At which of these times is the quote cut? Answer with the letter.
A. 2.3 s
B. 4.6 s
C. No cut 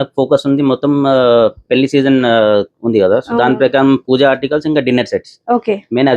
C